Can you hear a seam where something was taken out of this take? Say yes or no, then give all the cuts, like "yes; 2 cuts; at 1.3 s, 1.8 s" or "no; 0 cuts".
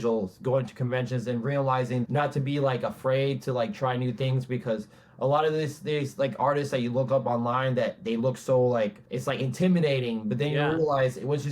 yes; 2 cuts; at 2.0 s, 9.1 s